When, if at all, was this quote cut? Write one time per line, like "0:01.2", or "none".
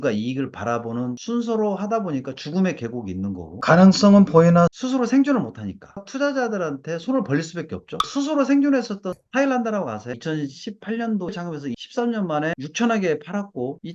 none